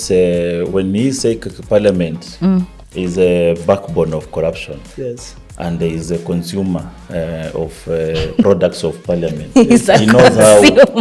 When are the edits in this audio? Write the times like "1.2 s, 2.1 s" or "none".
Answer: none